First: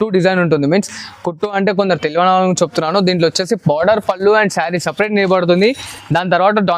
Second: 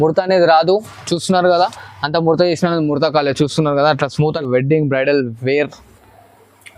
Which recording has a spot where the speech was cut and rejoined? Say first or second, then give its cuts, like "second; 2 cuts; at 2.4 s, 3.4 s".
second; 1 cut; at 4.4 s